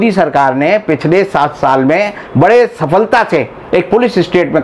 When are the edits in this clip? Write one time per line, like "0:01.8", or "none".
none